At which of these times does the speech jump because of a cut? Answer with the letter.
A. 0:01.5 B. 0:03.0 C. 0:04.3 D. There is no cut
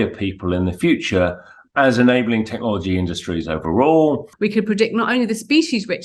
C